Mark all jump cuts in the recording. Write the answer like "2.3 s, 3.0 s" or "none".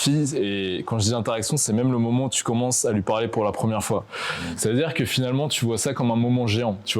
none

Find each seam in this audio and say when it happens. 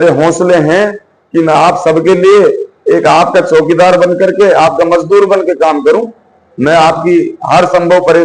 none

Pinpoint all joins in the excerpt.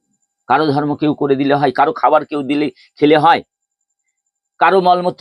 none

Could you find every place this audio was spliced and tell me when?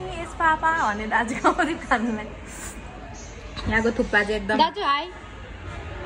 none

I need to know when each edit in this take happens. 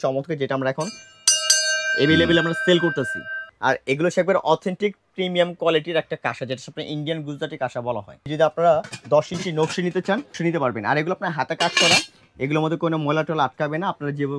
3.4 s, 8.3 s, 10.4 s

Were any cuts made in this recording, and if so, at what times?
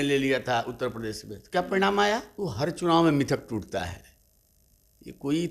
2.3 s

